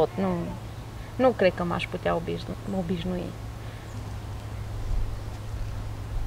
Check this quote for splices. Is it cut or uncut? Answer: cut